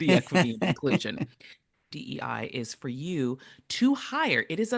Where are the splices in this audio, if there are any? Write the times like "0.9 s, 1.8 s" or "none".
1.8 s